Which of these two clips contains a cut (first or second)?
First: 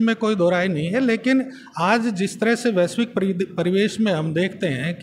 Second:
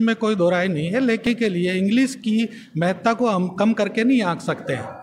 second